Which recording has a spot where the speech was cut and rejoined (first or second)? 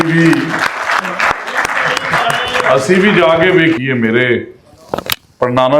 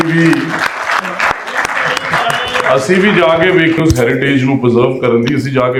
first